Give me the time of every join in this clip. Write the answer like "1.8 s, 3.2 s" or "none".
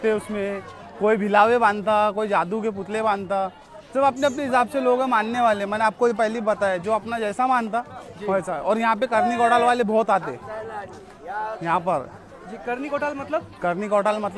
none